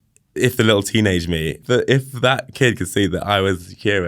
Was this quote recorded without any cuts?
no; 1 cut; at 1.6 s

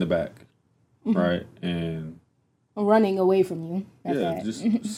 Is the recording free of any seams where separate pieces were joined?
yes; 0 cuts

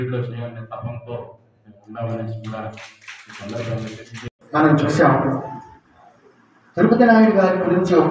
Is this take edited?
yes; 1 cut; at 4.3 s

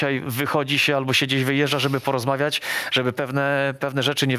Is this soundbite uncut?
yes; 0 cuts

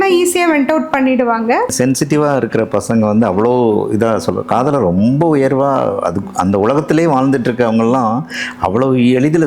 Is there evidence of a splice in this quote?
yes; 1 cut; at 1.7 s

